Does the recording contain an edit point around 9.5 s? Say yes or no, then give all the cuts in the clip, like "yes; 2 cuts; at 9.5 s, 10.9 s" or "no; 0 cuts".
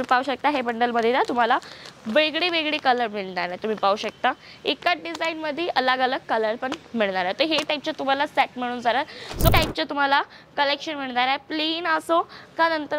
yes; 1 cut; at 9.5 s